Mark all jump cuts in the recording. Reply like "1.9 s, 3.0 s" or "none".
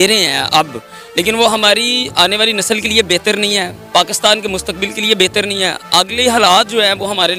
none